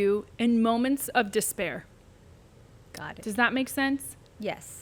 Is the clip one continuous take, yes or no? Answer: yes